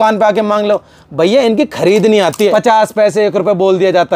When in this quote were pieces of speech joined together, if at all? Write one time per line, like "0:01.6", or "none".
0:02.5